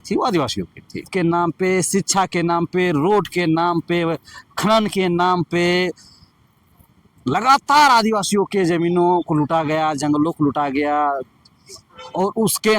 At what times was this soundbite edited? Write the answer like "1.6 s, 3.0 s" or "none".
1.1 s